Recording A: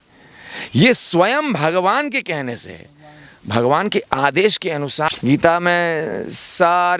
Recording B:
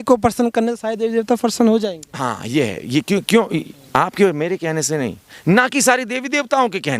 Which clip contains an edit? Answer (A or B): A